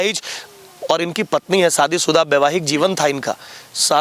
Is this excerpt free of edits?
yes; 0 cuts

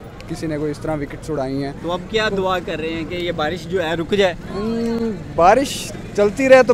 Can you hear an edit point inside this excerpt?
no; 0 cuts

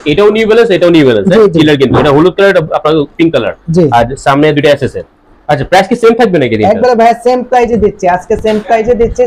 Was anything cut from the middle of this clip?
no; 0 cuts

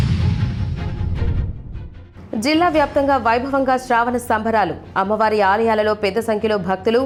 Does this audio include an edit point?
no; 0 cuts

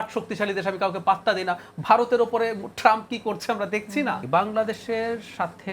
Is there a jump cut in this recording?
yes; 1 cut; at 4.2 s

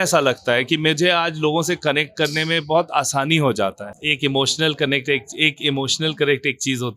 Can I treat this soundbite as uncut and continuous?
no; 1 cut; at 3.9 s

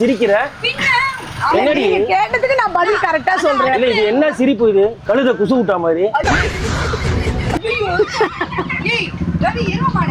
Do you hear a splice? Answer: no; 0 cuts

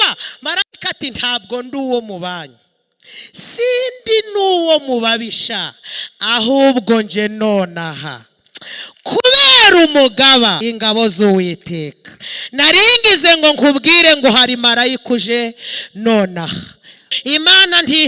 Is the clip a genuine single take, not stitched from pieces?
no; 2 cuts; at 10.6 s, 17.1 s

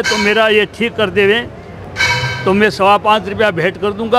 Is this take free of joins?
no; 1 cut; at 1.9 s

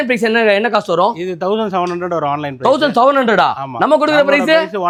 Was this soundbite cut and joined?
no; 0 cuts

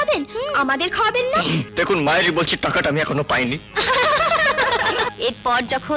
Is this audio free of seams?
no; 2 cuts; at 1.7 s, 5.1 s

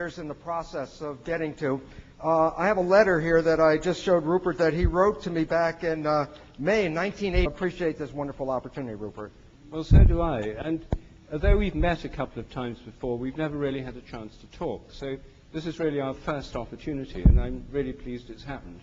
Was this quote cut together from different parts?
no; 0 cuts

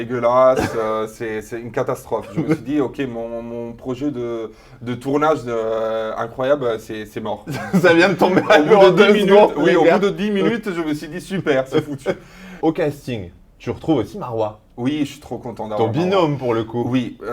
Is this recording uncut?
yes; 0 cuts

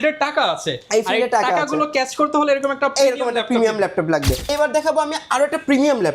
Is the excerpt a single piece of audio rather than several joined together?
no; 1 cut; at 4.4 s

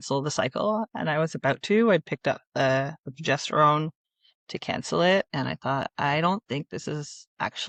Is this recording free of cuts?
yes; 0 cuts

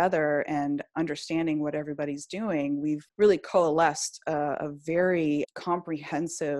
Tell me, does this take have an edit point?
yes; 2 cuts; at 3.1 s, 5.5 s

